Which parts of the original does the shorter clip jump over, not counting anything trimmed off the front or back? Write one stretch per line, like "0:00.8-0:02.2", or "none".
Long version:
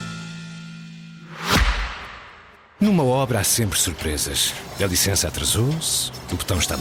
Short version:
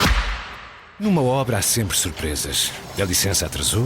0:02.5-0:02.9